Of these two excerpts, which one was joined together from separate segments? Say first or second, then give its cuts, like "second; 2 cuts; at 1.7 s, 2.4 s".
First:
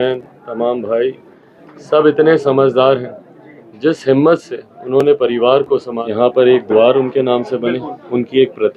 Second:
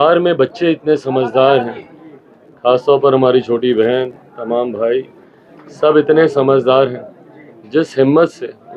first; 1 cut; at 5.9 s